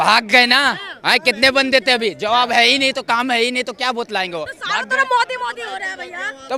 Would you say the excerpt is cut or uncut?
uncut